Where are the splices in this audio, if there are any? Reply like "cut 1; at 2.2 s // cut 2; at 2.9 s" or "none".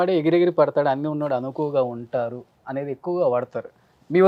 none